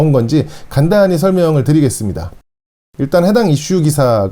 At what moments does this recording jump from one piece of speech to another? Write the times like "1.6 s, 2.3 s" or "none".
2.5 s